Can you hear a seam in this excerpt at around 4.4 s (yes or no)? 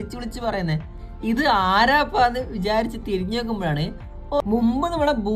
yes